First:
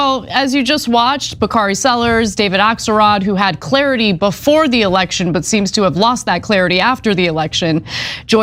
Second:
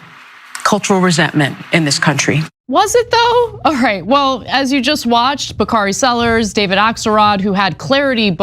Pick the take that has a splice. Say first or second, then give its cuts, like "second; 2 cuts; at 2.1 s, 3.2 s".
second; 1 cut; at 2.5 s